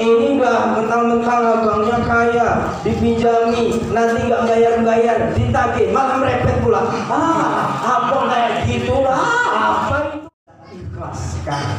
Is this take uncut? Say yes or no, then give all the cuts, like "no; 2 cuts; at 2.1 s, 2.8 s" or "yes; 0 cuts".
no; 1 cut; at 10.2 s